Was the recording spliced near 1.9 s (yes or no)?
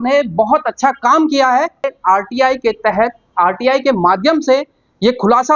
yes